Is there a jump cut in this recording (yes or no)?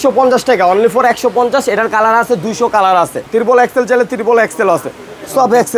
yes